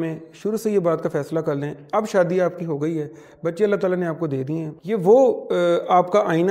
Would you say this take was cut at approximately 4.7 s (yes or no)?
yes